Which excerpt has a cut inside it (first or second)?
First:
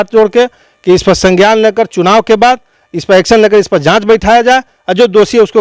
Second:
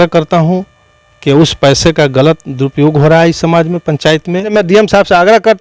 second